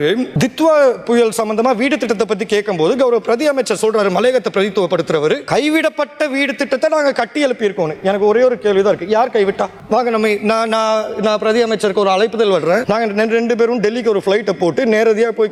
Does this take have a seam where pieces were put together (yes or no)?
no